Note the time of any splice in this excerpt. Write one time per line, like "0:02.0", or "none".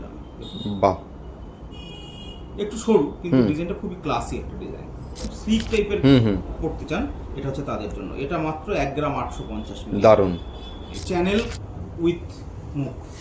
0:05.3
0:11.0